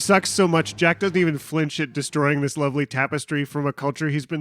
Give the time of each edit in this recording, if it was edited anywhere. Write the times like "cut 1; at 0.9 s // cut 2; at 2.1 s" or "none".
cut 1; at 3.5 s